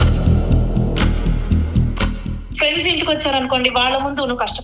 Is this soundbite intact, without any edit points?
no; 1 cut; at 2.4 s

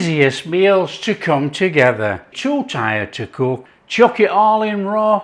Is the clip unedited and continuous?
no; 2 cuts; at 2.3 s, 3.7 s

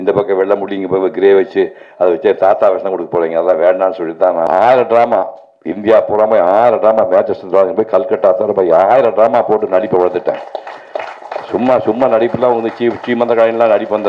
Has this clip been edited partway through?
yes; 1 cut; at 4.5 s

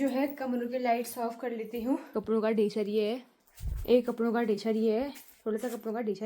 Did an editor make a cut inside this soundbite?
yes; 1 cut; at 2.1 s

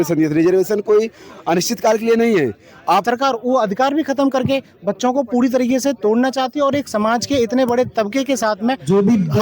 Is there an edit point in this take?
yes; 1 cut; at 3.0 s

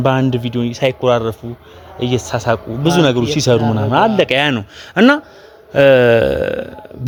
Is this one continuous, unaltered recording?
yes; 0 cuts

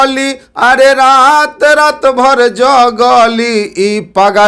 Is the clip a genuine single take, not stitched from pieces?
yes; 0 cuts

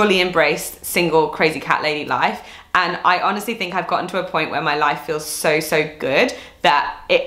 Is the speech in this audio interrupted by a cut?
no; 0 cuts

